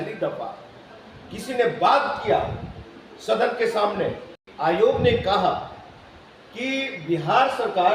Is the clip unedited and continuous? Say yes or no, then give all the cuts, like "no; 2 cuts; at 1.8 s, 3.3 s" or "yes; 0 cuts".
no; 1 cut; at 4.5 s